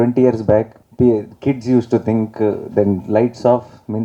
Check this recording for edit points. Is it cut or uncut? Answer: uncut